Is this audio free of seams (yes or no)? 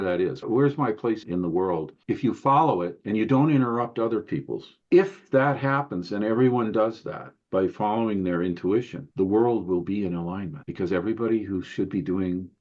no